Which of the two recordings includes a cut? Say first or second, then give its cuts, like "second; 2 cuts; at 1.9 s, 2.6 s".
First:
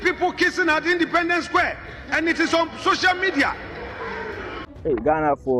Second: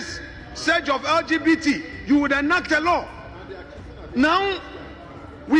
first; 1 cut; at 4.7 s